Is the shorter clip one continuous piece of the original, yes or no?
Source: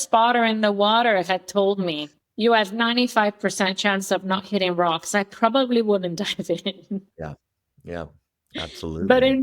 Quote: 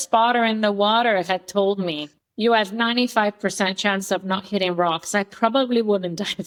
yes